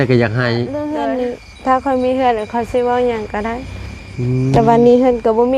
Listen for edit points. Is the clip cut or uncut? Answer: cut